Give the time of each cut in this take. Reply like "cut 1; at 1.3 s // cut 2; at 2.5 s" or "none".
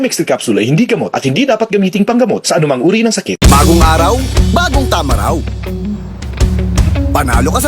cut 1; at 3.3 s

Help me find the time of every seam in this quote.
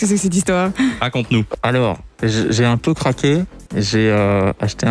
cut 1; at 1.5 s // cut 2; at 3.6 s

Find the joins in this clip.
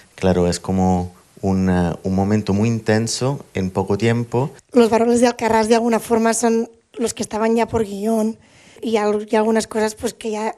cut 1; at 4.6 s // cut 2; at 8.8 s

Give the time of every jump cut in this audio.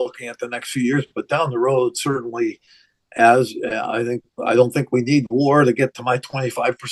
none

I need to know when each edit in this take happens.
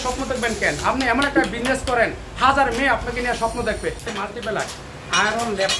cut 1; at 4.1 s

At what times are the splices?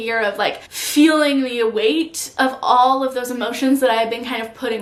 none

